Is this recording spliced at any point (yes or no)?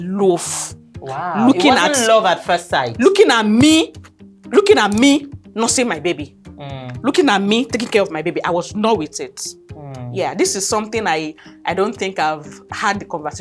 no